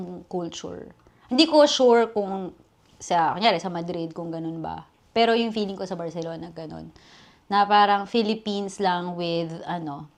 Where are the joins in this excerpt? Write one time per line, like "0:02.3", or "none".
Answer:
none